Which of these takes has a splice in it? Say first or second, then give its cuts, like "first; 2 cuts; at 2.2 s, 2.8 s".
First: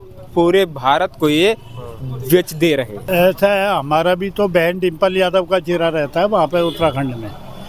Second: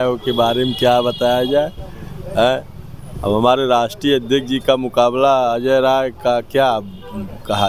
first; 1 cut; at 3.0 s